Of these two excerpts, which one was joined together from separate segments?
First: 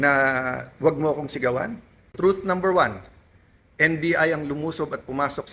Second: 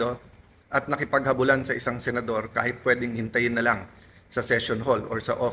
first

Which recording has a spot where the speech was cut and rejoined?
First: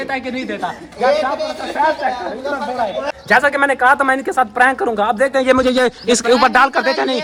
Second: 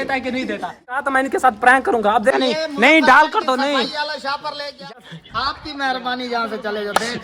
second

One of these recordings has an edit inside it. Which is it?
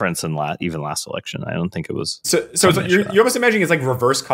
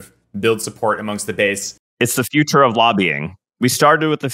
first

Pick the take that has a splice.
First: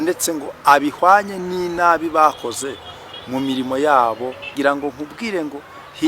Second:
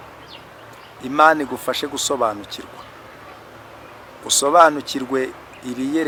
first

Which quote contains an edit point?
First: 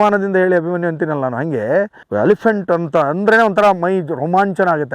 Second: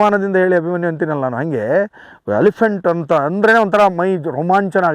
first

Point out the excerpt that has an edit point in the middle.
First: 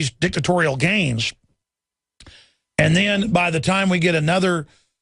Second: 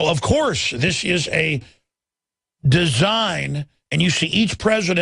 second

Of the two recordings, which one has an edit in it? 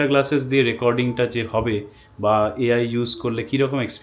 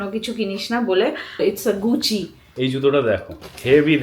second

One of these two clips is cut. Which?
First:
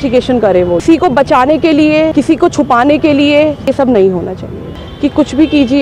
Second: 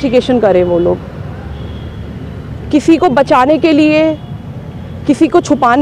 first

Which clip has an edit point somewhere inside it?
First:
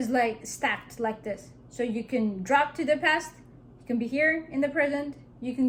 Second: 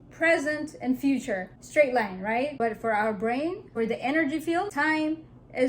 second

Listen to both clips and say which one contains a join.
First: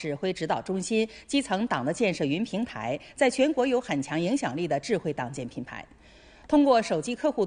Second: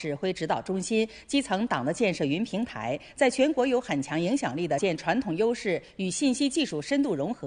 first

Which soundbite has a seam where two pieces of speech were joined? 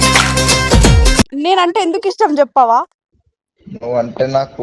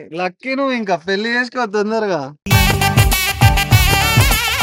first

